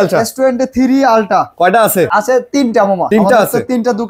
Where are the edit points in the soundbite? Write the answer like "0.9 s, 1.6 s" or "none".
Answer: 2.1 s, 3.0 s